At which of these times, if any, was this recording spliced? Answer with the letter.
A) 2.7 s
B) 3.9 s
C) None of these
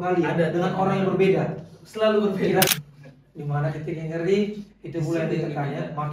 A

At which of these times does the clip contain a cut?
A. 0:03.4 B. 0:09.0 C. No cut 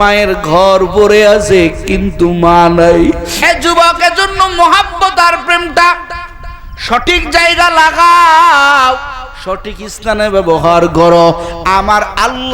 A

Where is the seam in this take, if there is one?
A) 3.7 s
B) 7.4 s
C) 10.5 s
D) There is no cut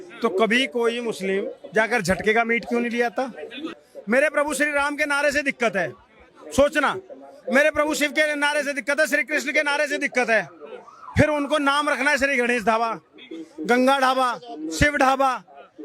A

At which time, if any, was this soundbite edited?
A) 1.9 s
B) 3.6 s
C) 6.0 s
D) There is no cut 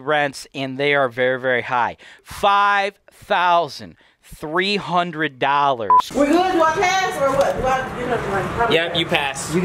C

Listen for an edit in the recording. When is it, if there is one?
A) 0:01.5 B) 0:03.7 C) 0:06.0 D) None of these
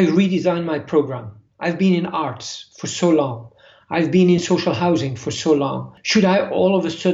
C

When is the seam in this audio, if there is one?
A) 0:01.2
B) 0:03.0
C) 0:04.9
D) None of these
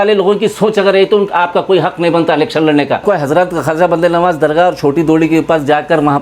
B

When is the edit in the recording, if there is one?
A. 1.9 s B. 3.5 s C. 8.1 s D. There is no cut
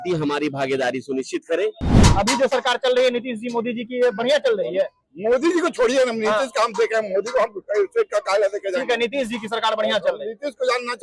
A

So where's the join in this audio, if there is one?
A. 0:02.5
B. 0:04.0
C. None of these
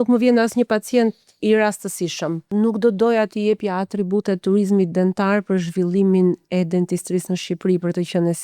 A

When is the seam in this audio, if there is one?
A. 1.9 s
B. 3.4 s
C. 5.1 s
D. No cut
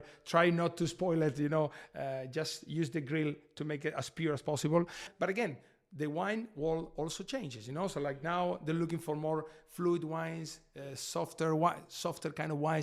C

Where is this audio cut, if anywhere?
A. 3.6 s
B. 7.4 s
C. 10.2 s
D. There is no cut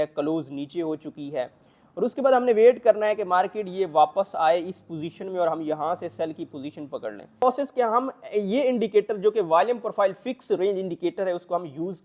B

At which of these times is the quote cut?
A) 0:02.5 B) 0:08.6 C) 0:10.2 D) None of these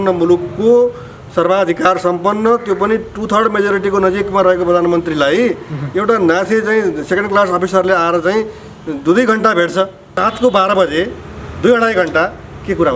C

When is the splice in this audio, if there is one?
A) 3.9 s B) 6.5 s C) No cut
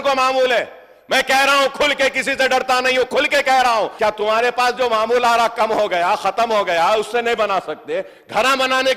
A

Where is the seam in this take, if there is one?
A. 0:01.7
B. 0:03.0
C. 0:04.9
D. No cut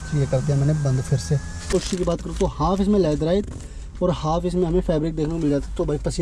A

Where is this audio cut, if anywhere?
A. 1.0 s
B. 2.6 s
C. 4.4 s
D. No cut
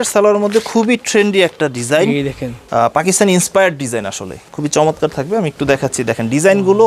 D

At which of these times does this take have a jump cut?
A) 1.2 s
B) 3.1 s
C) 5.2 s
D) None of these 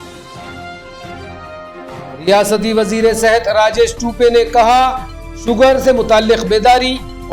A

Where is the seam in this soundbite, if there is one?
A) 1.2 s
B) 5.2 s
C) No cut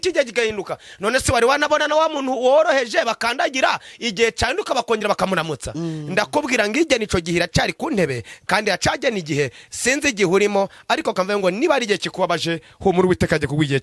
C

